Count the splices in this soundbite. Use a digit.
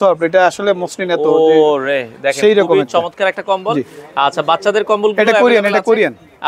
0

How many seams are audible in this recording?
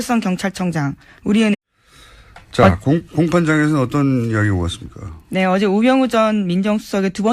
0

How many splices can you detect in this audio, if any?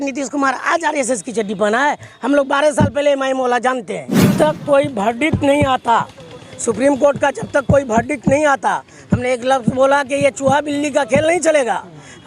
1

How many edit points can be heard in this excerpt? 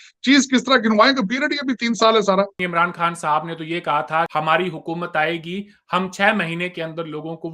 2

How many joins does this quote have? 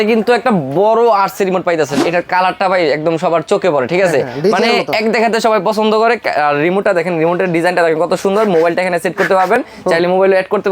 1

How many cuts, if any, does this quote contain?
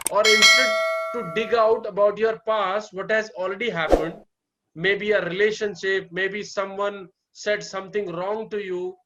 0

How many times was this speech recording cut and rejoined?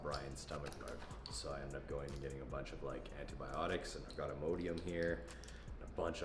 0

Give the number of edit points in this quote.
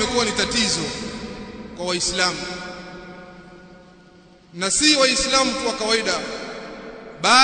0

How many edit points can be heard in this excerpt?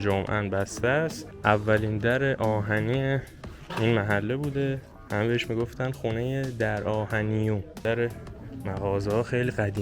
3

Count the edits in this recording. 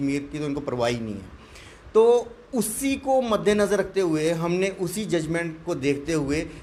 0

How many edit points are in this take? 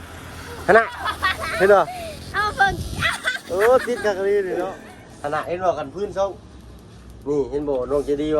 1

